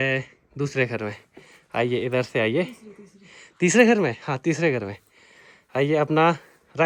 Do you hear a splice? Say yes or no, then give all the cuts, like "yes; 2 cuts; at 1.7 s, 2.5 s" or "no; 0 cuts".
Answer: no; 0 cuts